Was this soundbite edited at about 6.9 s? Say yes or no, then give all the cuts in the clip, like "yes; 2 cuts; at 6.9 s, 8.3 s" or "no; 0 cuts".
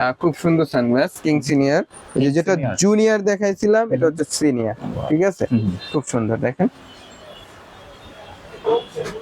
no; 0 cuts